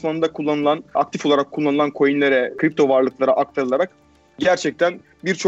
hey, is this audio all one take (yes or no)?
no